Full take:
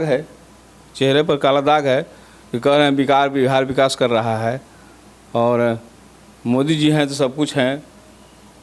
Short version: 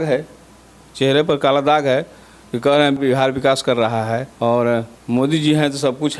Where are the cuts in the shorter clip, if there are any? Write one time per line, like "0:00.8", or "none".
0:03.0
0:04.3
0:05.0